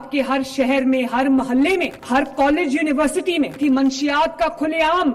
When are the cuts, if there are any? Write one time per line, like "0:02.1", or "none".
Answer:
0:02.0
0:03.6